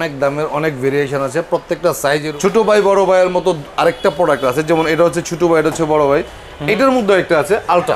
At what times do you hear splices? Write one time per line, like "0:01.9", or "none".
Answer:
0:02.3